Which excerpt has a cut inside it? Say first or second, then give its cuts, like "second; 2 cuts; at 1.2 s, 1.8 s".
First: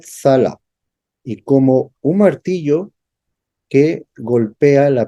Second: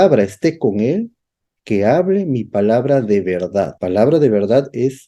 second; 1 cut; at 3.8 s